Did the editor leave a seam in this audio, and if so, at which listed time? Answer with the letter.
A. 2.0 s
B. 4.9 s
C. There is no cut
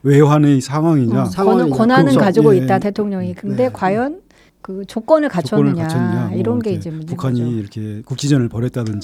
C